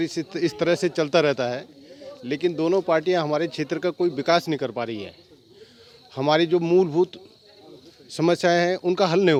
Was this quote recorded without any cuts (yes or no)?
yes